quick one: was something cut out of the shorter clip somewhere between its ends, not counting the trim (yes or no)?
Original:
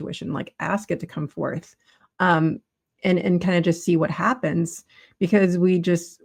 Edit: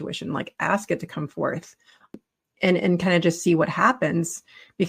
yes